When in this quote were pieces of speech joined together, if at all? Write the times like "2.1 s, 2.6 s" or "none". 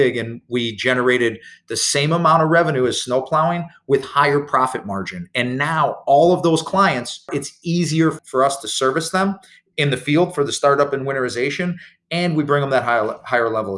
7.3 s, 8.2 s